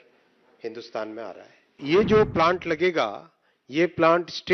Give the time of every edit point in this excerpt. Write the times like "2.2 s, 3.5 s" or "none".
1.8 s